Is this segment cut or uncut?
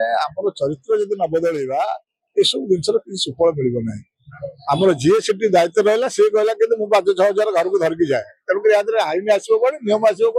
uncut